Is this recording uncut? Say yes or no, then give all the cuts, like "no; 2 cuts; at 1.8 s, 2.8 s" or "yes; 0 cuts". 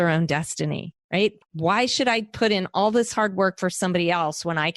no; 1 cut; at 1.2 s